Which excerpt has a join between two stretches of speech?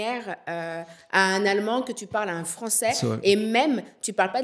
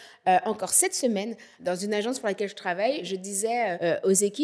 second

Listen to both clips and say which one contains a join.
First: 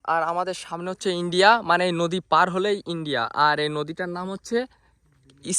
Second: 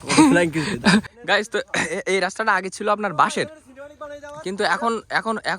second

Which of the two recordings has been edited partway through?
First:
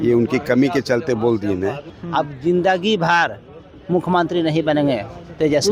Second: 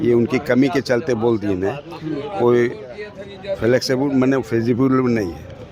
first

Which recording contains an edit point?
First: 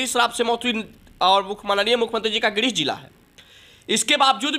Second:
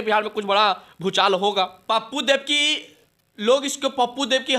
second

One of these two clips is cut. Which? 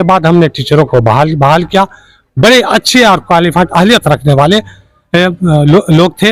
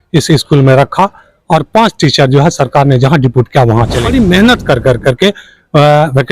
second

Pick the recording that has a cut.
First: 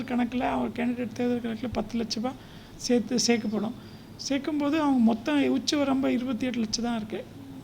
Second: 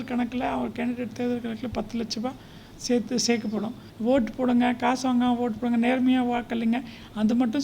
second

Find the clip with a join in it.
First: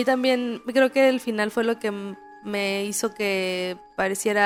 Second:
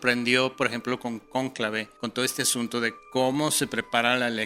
second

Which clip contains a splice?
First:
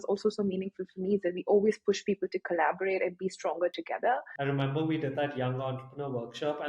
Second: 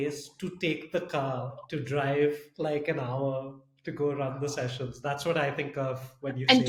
first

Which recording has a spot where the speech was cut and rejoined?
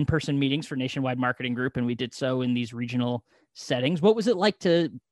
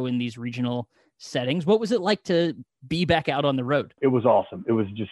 second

